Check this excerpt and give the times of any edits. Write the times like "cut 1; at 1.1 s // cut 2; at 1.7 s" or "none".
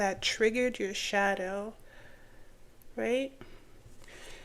none